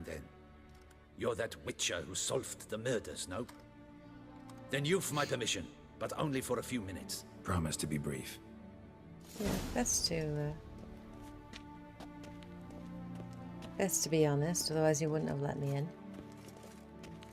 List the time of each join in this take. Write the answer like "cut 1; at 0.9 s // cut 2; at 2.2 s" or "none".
cut 1; at 2.2 s